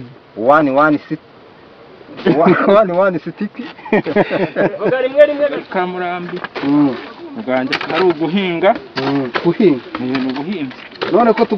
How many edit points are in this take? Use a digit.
1